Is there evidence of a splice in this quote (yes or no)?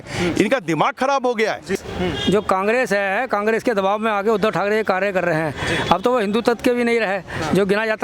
yes